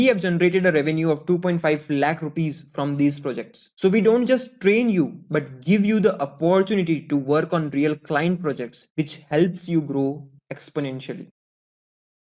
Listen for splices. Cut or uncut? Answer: uncut